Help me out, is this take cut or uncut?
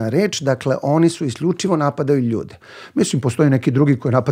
uncut